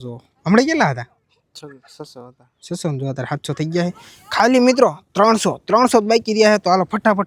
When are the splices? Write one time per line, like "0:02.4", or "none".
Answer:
none